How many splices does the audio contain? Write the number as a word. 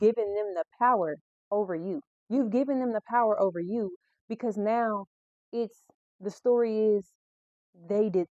zero